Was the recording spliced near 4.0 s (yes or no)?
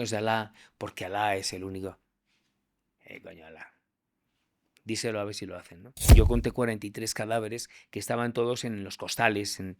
no